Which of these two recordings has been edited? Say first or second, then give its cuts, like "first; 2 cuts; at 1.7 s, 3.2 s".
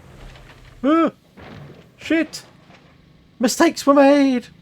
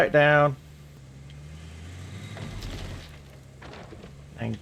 second; 1 cut; at 1.0 s